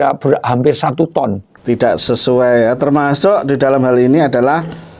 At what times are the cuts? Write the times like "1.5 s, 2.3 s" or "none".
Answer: 1.5 s